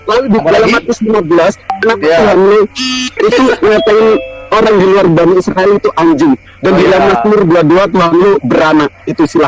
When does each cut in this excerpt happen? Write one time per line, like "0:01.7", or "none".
none